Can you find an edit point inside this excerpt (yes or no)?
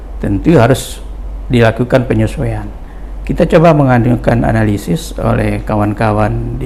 no